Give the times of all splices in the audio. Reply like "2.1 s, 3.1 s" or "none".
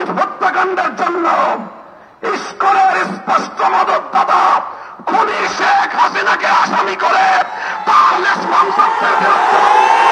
none

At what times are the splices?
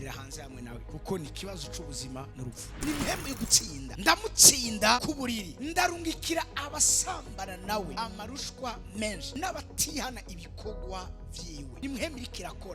2.7 s

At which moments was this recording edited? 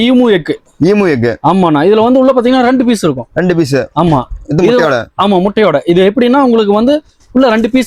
none

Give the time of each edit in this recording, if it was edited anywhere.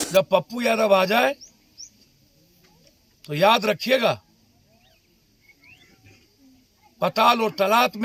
none

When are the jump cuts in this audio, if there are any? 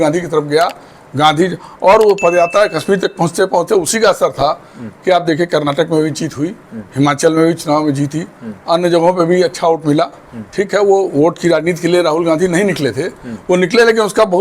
none

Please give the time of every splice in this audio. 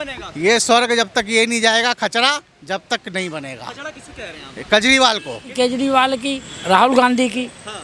5.5 s, 6.5 s

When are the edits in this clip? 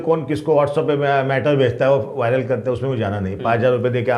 none

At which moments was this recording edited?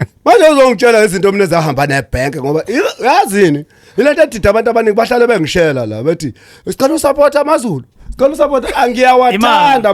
none

